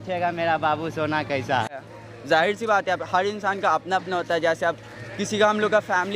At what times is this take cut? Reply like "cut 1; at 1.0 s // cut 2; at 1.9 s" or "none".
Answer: cut 1; at 1.8 s